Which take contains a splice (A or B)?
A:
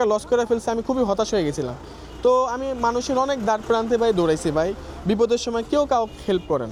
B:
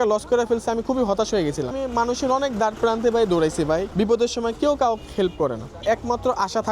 B